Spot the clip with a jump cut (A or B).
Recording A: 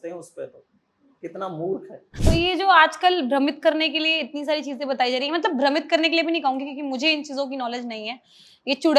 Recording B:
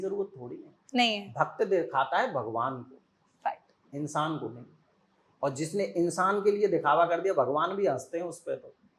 A